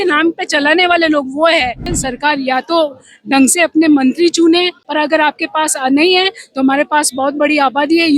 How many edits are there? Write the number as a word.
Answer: two